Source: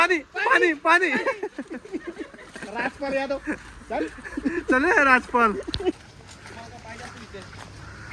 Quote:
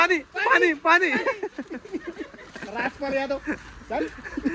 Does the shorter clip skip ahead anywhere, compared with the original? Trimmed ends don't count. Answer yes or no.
no